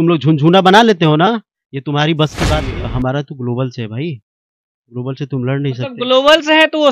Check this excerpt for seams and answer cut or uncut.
cut